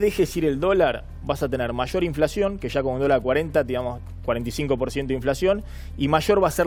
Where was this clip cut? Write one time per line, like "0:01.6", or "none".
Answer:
none